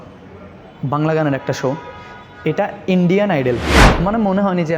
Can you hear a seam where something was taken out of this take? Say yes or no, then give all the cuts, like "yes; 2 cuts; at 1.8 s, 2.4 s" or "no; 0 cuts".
yes; 1 cut; at 3.8 s